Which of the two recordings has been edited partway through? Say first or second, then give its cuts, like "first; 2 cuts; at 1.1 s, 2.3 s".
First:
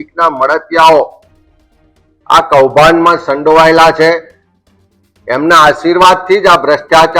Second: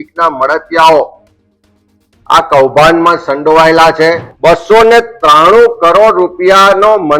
second; 1 cut; at 4.3 s